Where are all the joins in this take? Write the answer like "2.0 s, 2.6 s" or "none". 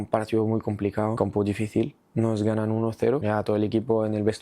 1.2 s, 3.2 s